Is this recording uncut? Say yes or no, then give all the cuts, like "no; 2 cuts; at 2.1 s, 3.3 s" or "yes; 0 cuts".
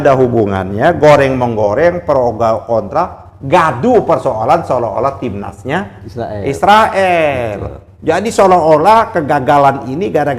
yes; 0 cuts